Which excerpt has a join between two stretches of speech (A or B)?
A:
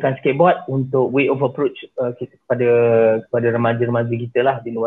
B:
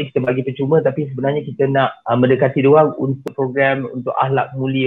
B